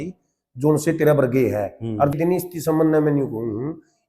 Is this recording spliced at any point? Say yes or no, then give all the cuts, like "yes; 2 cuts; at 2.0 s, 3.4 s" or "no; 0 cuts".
yes; 1 cut; at 2.1 s